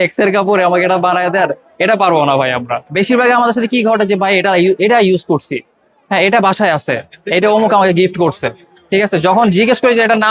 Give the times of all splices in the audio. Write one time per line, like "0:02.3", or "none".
0:02.8